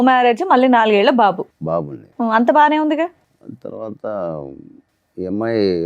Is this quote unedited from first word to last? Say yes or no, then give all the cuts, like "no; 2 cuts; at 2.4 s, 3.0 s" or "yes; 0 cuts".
yes; 0 cuts